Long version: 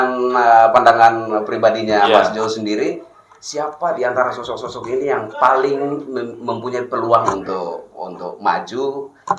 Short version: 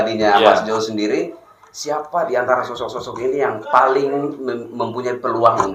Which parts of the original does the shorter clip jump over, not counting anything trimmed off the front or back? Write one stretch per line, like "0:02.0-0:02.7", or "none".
none